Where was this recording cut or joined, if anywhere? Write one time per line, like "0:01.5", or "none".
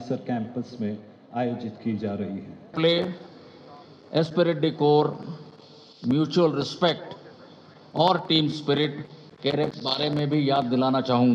0:02.7